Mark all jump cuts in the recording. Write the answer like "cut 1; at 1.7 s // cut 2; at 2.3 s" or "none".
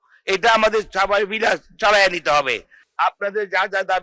cut 1; at 2.8 s